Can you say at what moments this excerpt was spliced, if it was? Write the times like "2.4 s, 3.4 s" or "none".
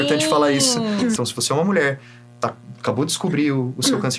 1.2 s